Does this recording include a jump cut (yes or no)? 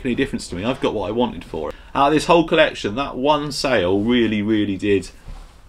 yes